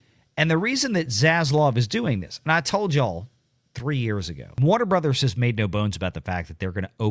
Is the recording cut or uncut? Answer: cut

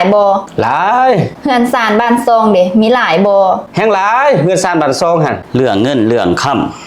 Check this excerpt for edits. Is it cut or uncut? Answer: cut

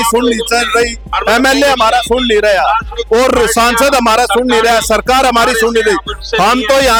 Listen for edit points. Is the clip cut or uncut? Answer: uncut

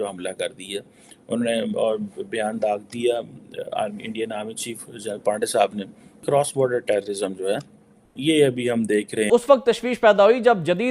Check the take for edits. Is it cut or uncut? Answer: cut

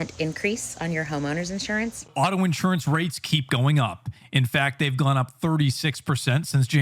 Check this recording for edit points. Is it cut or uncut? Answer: cut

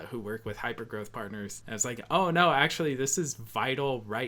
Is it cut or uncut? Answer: uncut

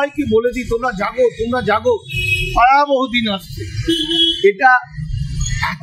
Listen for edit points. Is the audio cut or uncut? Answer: uncut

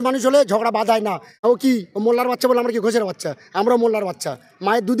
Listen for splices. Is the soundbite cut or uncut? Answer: cut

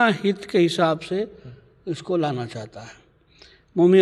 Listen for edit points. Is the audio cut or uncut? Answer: uncut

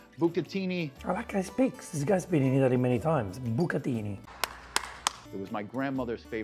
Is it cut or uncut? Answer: cut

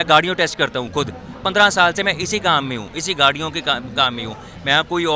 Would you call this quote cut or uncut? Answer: uncut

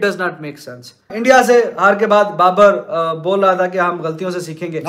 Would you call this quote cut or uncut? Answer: cut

